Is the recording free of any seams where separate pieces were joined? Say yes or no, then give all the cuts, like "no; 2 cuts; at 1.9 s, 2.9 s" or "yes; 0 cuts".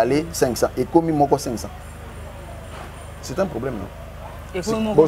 yes; 0 cuts